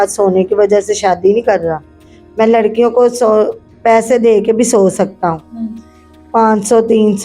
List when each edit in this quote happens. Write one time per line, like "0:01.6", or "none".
none